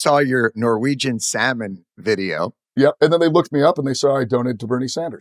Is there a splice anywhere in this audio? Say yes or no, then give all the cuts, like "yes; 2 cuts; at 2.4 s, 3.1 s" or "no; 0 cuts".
yes; 1 cut; at 2.6 s